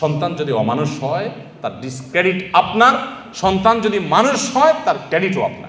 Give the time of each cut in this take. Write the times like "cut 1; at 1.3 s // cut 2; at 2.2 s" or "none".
none